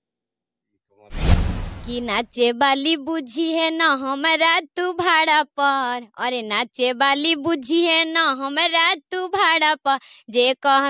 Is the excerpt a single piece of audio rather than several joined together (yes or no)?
no